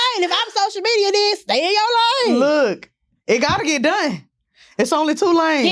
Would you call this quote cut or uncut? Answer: uncut